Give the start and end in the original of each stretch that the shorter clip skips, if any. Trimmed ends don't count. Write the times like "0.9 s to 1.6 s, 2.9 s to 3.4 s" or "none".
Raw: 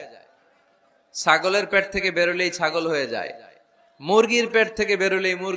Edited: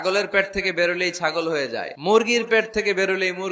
3.3 s to 3.9 s